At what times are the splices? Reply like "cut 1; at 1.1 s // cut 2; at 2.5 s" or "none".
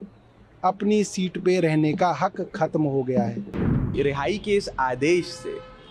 cut 1; at 3.9 s